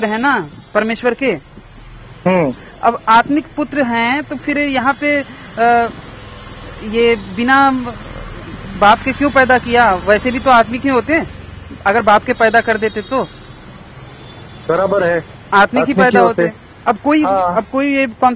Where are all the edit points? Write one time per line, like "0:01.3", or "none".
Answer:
none